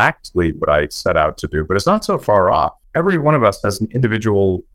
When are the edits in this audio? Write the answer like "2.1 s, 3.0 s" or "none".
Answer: 2.8 s